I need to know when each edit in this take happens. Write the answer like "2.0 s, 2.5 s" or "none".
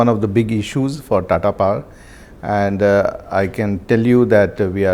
none